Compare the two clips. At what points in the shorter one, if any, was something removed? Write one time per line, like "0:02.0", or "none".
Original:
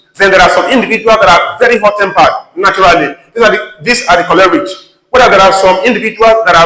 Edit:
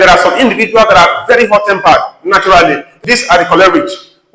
0:02.9